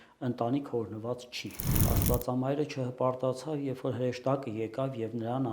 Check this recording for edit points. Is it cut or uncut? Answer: cut